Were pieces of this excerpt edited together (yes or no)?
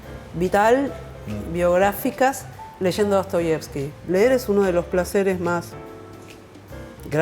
yes